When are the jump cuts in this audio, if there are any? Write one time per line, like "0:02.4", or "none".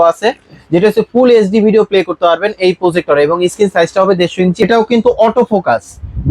0:04.6